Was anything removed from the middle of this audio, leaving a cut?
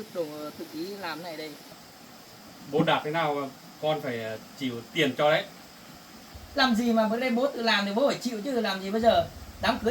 yes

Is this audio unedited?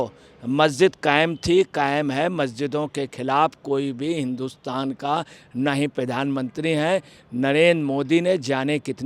yes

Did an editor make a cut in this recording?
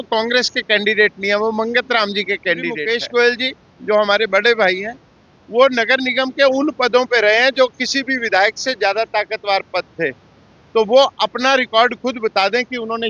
yes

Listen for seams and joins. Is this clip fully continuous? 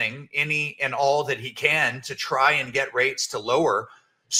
yes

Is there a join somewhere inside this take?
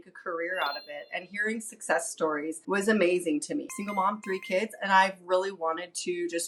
no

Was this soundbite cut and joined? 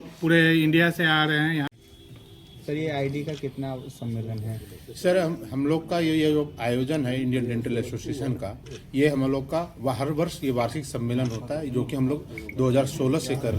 yes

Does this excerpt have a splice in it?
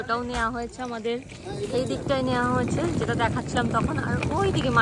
no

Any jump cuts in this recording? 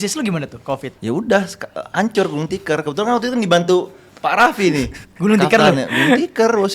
yes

